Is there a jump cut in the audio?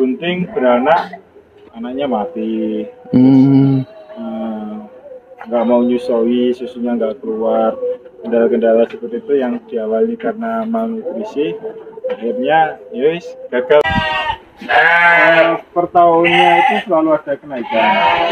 yes; 1 cut; at 13.8 s

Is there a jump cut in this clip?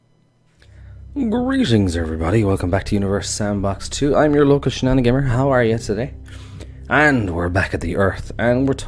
yes; 1 cut; at 3.9 s

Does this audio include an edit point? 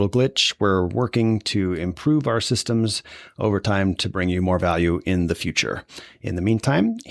no; 0 cuts

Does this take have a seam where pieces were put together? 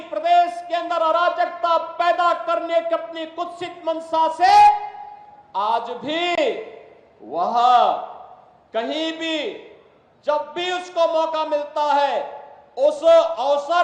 no; 0 cuts

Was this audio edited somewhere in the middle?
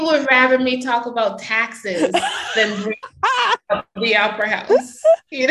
yes; 1 cut; at 3.1 s

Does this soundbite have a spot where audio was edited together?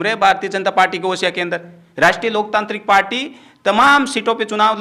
no; 0 cuts

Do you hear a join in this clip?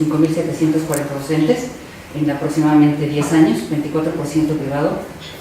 yes; 1 cut; at 2.5 s

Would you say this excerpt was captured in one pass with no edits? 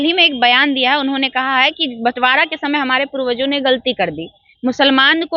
yes; 0 cuts

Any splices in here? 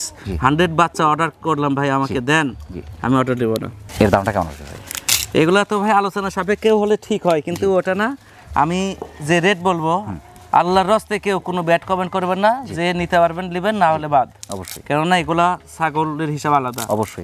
no; 0 cuts

